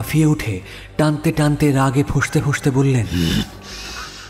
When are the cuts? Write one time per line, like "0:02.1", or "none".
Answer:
0:03.1